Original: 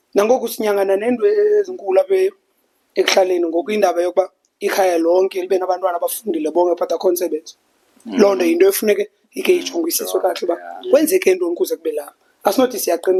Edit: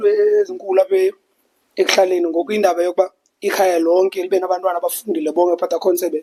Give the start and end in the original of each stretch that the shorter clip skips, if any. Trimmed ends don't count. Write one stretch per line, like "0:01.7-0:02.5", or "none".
none

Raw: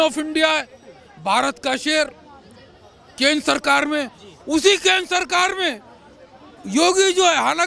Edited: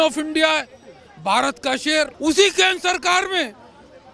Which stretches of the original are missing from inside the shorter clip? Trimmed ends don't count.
0:02.1-0:04.4

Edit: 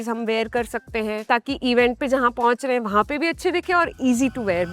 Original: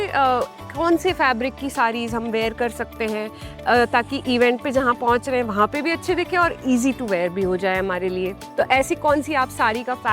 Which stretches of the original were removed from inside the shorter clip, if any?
0:03.3-0:03.9

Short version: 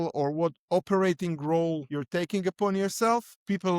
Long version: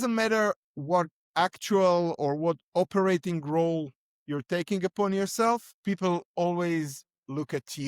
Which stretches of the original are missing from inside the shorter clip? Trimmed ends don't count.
0:04.0-0:04.3

